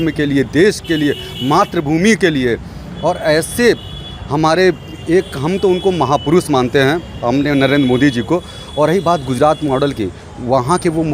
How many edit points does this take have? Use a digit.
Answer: 0